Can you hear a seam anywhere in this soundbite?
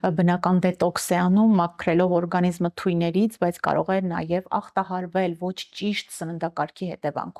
no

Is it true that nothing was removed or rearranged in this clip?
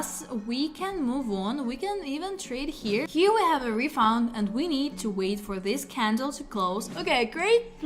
no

